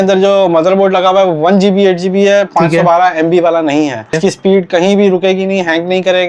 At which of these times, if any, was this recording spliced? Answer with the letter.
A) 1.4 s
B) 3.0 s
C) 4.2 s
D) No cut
C